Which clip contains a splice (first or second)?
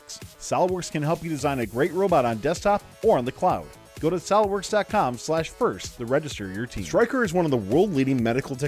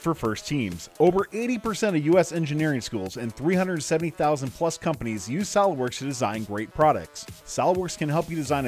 first